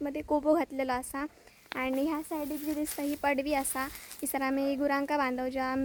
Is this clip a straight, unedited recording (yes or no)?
yes